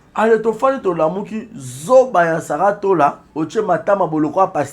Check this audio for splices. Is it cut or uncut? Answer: cut